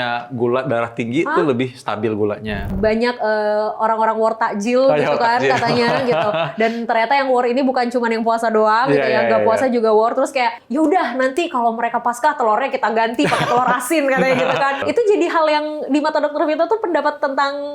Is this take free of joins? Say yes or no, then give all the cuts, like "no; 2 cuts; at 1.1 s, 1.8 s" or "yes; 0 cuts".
no; 3 cuts; at 2.7 s, 10.6 s, 14.8 s